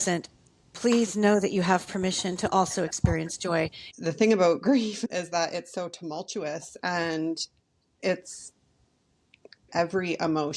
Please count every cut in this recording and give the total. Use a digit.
1